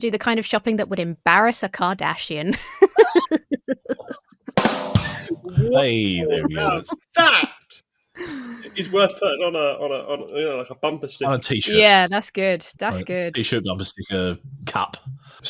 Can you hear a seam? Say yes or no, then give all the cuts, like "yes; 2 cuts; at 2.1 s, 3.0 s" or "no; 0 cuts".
no; 0 cuts